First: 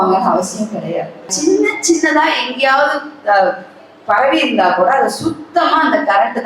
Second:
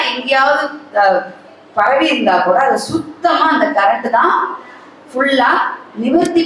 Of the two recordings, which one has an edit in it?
first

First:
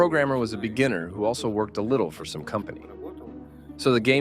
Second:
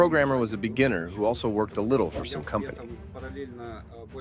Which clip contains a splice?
first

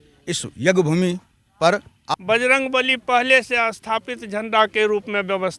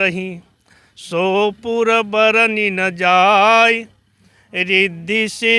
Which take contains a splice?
first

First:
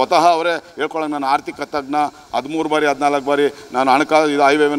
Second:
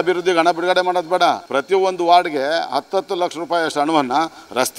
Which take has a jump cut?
second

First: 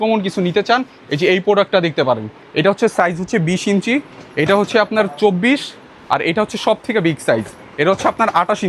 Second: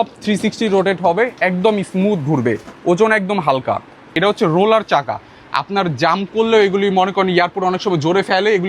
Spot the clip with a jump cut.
second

